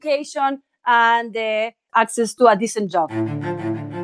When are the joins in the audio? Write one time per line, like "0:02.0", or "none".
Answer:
0:01.8
0:03.1